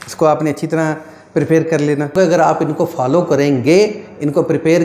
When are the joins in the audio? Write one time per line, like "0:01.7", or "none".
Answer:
0:02.1